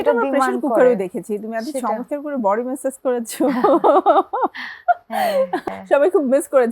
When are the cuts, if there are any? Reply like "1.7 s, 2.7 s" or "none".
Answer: 5.7 s